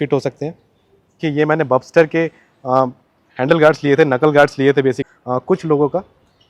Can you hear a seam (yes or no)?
yes